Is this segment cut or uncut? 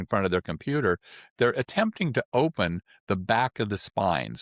uncut